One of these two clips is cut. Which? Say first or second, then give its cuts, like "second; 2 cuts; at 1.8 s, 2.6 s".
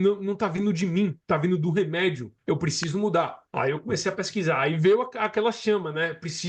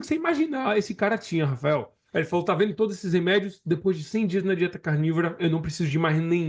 first; 3 cuts; at 1.2 s, 2.3 s, 3.4 s